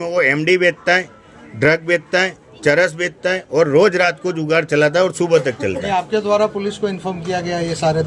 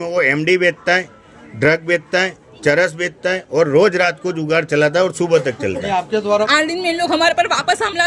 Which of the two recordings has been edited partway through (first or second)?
second